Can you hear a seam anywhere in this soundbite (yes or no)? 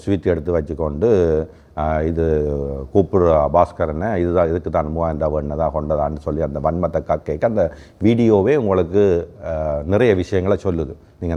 no